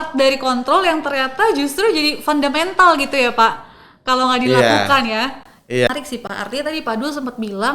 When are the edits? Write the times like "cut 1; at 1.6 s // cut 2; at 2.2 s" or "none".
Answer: cut 1; at 5.9 s